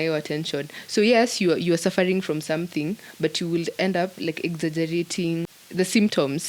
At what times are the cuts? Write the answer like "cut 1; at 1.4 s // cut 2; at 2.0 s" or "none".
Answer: cut 1; at 5.5 s